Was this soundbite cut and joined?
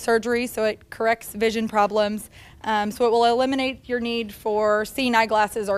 no; 0 cuts

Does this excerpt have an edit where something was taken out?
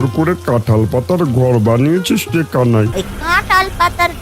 yes; 1 cut; at 3.0 s

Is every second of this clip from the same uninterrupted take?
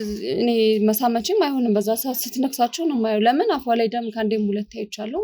yes; 0 cuts

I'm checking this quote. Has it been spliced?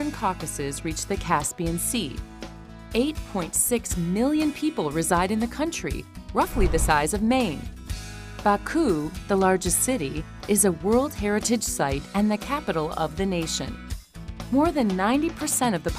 yes; 1 cut; at 5.5 s

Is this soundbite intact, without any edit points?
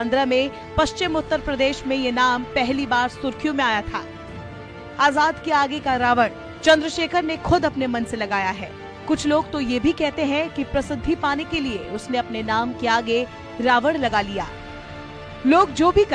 yes; 0 cuts

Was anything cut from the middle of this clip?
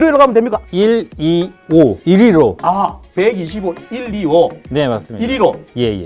yes; 1 cut; at 2.6 s

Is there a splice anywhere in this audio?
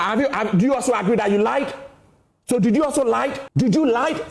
yes; 1 cut; at 3.4 s

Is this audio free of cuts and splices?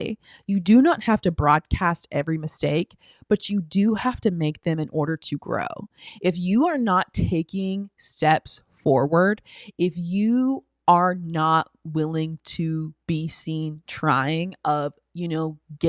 yes; 0 cuts

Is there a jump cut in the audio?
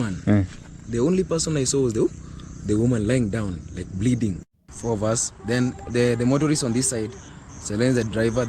yes; 1 cut; at 4.4 s

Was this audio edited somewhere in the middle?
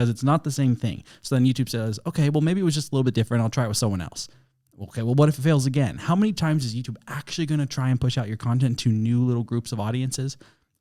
no; 0 cuts

